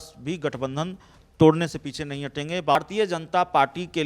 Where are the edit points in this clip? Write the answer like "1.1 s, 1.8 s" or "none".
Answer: 2.8 s

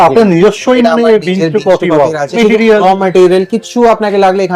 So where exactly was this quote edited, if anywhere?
2.4 s

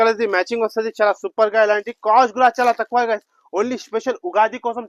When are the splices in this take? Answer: none

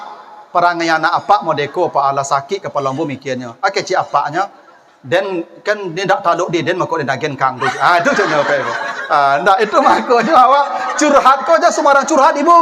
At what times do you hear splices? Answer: none

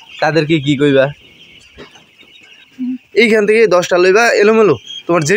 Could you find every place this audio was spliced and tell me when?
2.7 s

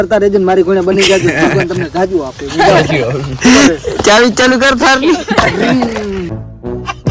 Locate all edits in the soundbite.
none

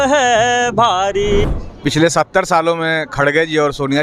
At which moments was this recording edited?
1.4 s

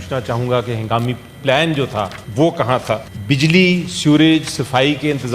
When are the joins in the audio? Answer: 2.2 s, 3.1 s

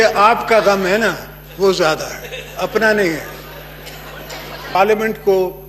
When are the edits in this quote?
4.7 s

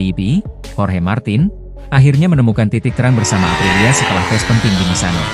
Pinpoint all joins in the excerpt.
none

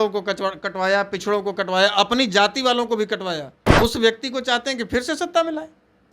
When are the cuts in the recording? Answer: 3.6 s

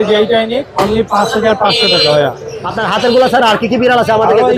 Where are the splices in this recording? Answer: 2.7 s

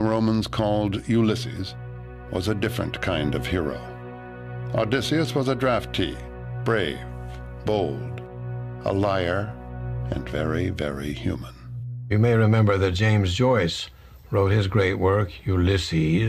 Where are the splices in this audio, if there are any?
2.5 s

